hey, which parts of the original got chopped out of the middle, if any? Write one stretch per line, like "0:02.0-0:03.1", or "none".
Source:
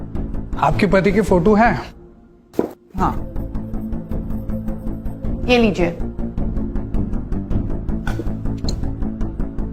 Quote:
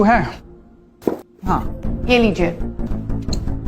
0:03.3-0:05.2
0:06.3-0:08.3